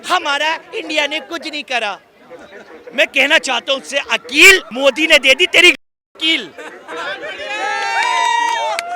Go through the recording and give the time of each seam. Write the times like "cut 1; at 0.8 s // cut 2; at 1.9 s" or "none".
none